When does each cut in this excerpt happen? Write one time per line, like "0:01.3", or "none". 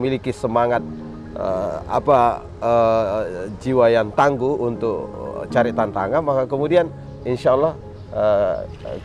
0:07.1